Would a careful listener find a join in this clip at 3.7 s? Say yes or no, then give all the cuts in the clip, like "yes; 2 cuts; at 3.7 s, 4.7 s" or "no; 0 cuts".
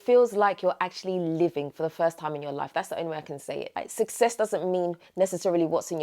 yes; 1 cut; at 3.7 s